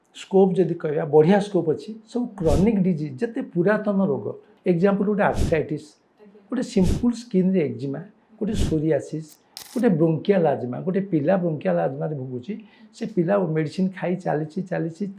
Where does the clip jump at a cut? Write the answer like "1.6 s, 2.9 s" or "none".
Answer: 4.5 s, 9.5 s

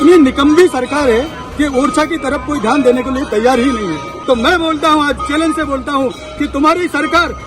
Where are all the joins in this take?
4.1 s

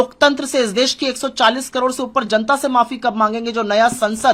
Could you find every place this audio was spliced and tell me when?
none

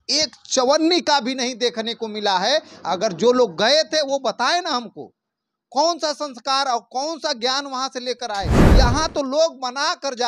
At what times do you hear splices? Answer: 8.6 s

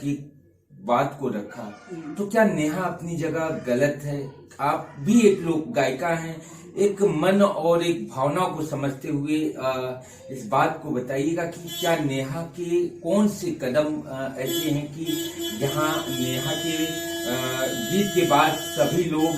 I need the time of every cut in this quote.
none

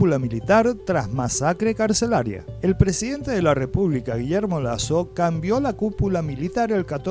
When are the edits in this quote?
none

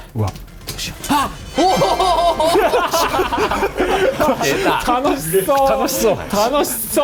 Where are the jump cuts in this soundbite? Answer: none

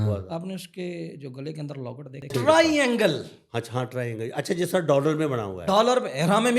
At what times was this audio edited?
2.3 s

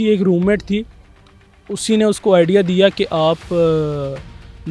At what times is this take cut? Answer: none

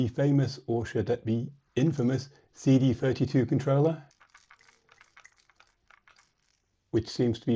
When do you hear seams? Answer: 4.2 s

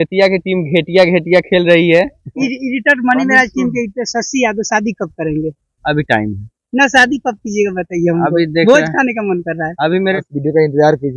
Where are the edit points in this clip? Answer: 2.3 s, 10.2 s

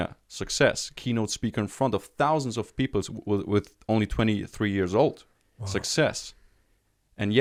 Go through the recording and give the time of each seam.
none

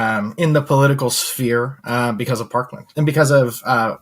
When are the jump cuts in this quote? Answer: 2.9 s

